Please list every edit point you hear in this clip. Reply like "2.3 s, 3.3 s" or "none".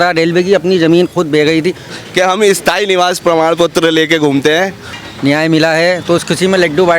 1.9 s, 4.9 s